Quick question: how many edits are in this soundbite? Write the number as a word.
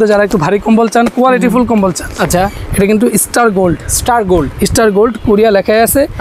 zero